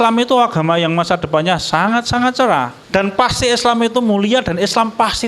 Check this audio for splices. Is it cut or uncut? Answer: cut